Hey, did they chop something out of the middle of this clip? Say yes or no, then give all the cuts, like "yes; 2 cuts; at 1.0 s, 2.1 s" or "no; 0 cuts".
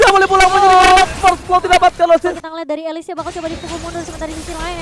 yes; 1 cut; at 2.5 s